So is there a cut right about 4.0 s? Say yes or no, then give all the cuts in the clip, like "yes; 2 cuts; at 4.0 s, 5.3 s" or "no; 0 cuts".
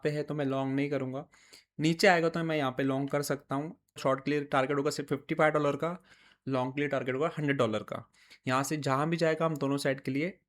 yes; 1 cut; at 4.0 s